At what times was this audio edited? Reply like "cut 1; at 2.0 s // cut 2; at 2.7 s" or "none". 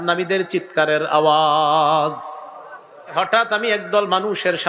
cut 1; at 3.1 s

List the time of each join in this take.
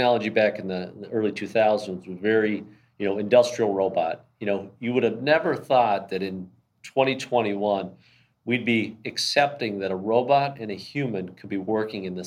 none

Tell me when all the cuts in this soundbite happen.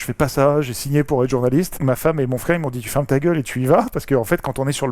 cut 1; at 1.7 s

